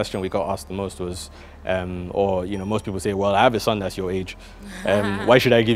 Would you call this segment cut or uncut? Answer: uncut